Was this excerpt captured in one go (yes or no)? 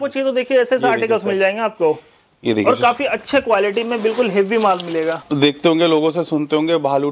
no